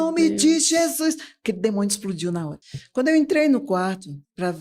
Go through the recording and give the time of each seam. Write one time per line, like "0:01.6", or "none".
0:02.6